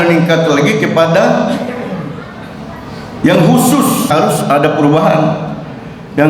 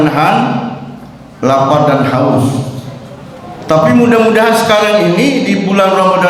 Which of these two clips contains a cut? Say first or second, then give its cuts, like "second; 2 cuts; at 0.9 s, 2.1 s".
first; 1 cut; at 4.1 s